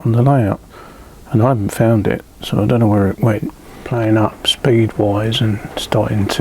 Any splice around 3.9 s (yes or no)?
yes